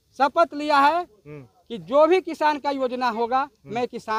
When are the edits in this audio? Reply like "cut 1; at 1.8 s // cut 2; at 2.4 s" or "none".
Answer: none